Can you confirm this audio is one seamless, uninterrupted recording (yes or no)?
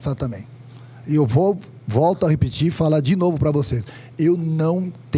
yes